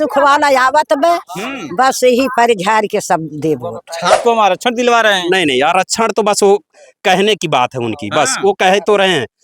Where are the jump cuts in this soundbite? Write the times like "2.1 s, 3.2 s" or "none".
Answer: 4.2 s

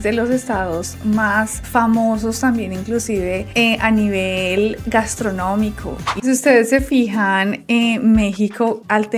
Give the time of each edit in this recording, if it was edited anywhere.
6.1 s

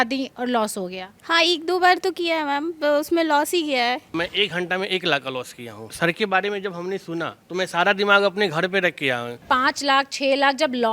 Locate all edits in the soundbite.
4.0 s, 5.9 s, 9.4 s

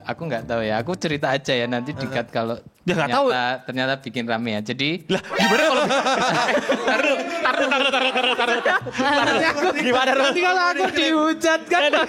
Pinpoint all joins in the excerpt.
none

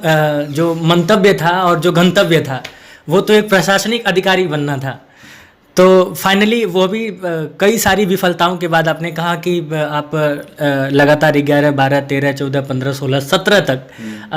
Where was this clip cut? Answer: none

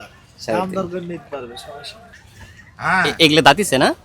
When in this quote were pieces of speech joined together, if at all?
2.0 s

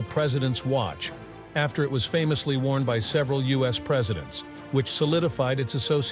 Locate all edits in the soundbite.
none

